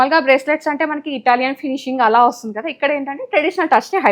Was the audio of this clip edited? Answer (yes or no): no